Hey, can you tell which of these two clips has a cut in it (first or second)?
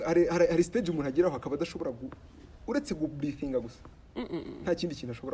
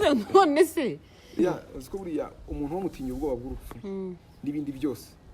second